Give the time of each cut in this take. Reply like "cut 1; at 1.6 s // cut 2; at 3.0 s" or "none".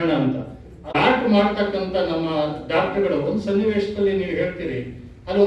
cut 1; at 1.0 s